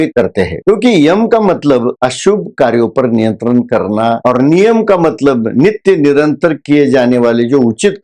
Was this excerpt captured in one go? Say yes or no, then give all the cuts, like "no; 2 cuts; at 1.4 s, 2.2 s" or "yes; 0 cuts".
no; 1 cut; at 4.2 s